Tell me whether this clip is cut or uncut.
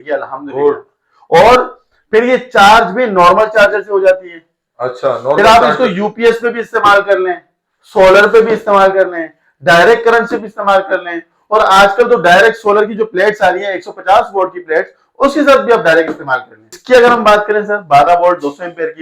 cut